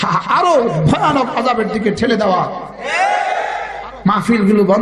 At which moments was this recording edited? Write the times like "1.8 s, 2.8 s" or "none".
3.7 s

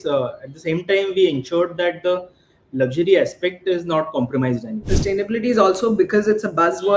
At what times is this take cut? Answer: 4.9 s

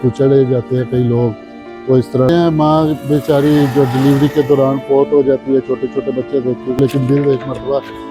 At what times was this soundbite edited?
2.3 s, 6.8 s

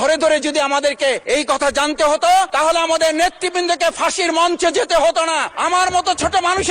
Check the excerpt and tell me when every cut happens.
1.2 s, 2.5 s, 5.5 s

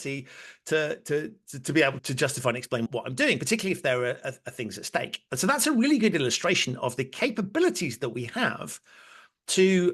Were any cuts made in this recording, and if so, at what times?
2.0 s, 2.9 s

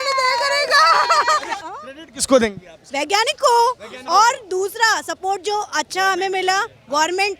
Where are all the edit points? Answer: 1.5 s

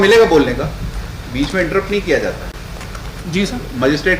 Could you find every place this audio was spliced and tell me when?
3.2 s

